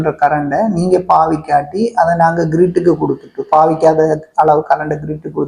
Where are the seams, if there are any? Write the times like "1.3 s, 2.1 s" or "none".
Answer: none